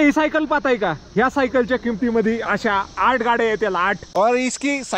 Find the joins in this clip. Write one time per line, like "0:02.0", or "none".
0:04.0